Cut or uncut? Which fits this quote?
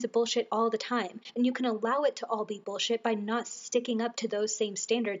cut